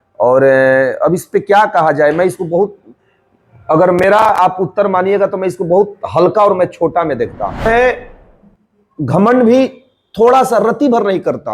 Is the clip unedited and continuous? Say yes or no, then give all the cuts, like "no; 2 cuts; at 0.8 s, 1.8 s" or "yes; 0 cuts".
no; 1 cut; at 7.6 s